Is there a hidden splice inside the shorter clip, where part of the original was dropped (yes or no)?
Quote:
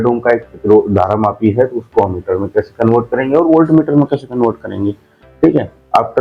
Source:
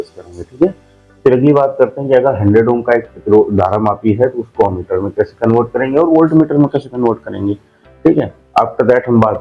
no